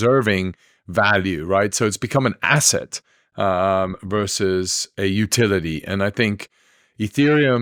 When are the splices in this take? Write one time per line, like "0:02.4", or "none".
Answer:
none